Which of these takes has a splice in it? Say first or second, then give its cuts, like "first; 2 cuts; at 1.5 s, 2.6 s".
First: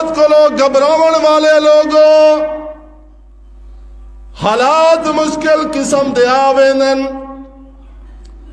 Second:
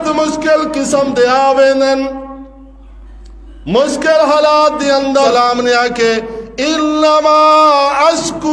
second; 1 cut; at 5.3 s